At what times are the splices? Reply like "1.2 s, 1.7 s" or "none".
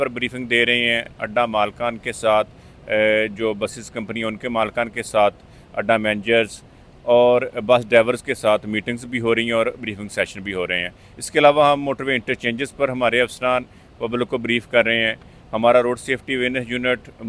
none